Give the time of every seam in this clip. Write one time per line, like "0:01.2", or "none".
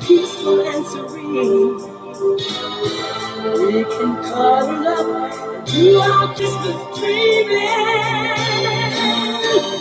0:06.4